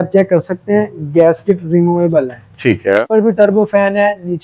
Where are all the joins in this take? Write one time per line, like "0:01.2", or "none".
0:03.1